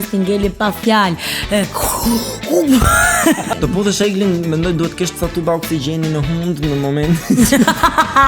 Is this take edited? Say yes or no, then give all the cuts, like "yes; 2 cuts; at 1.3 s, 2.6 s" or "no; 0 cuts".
yes; 1 cut; at 3.5 s